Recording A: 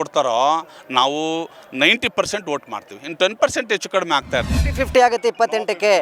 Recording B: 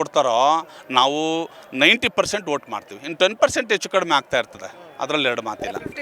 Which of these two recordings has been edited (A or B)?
A